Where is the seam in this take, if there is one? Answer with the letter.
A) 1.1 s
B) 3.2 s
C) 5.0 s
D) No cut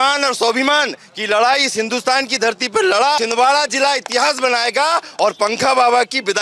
B